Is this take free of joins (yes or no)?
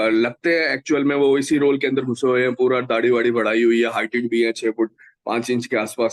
yes